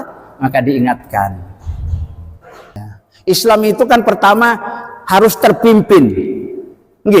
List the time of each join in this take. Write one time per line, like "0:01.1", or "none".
0:03.0